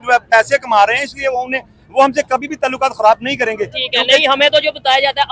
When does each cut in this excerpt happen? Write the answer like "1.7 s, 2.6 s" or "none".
none